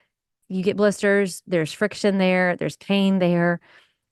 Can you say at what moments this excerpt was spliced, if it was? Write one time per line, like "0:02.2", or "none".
none